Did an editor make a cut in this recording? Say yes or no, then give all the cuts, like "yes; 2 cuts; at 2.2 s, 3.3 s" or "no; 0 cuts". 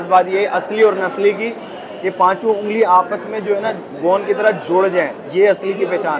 yes; 1 cut; at 5.2 s